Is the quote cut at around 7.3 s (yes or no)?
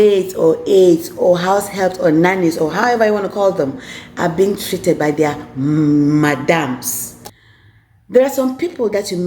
yes